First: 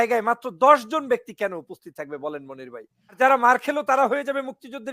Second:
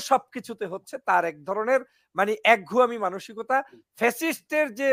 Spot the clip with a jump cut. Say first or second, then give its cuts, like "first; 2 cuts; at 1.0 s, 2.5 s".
first; 1 cut; at 3.2 s